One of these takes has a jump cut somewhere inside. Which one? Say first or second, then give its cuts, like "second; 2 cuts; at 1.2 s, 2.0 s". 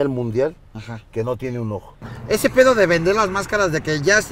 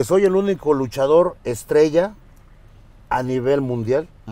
first; 1 cut; at 2.2 s